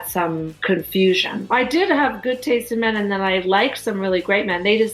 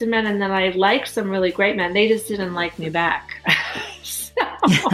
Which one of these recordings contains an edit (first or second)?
first